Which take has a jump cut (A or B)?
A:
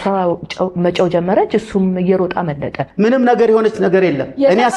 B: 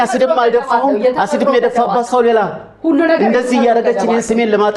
A